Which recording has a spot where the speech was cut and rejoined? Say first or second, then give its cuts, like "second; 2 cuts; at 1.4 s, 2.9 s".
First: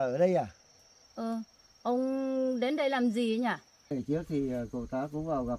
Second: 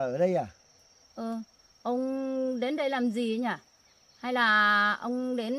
first; 1 cut; at 3.9 s